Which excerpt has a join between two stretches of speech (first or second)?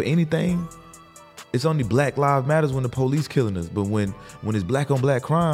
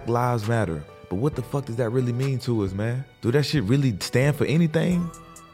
second